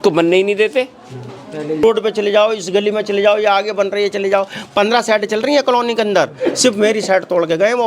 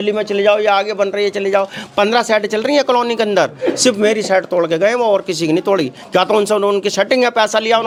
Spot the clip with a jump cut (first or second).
first